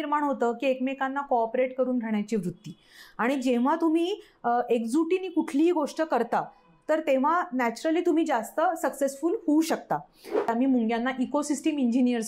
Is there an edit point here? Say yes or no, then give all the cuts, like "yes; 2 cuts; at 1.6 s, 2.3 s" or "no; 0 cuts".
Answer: yes; 1 cut; at 10.5 s